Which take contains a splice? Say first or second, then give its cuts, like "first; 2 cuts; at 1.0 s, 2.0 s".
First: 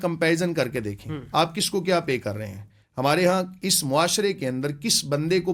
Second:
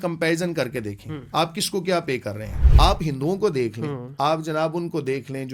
second; 1 cut; at 2.6 s